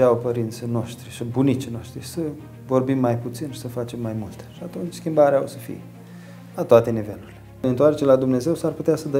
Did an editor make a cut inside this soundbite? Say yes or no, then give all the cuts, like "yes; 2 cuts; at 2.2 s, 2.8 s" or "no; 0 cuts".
yes; 1 cut; at 7.6 s